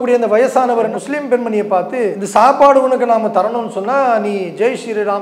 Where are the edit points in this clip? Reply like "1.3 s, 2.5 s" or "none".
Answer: 0.9 s, 2.2 s